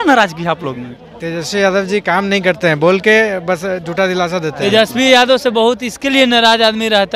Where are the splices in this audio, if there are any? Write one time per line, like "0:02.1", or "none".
0:04.6